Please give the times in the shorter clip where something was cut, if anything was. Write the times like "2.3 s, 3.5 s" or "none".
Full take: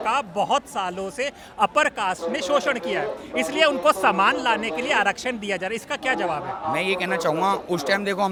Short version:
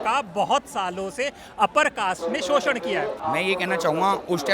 3.2 s